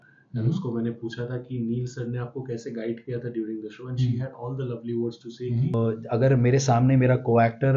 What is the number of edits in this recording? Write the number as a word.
one